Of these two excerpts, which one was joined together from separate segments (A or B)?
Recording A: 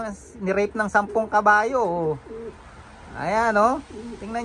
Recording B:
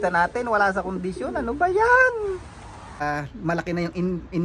B